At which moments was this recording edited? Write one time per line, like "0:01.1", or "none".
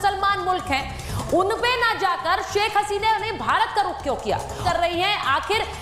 0:04.6

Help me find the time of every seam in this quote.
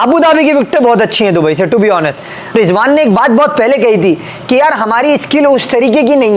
0:02.5

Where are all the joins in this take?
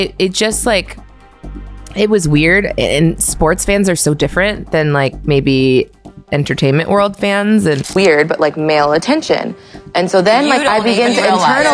0:07.8

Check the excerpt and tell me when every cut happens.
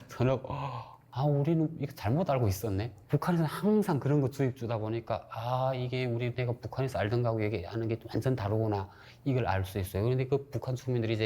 0:01.0
0:02.0

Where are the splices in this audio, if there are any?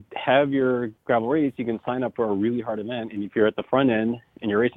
0:00.9

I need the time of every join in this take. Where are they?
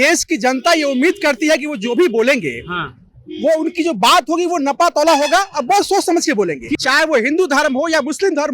0:06.8

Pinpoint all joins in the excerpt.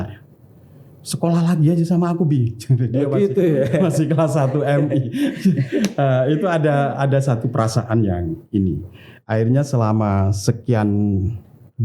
none

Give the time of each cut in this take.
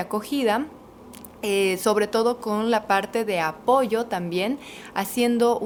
none

